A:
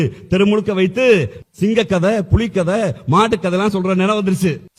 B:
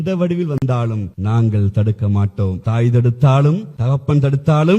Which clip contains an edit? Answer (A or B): B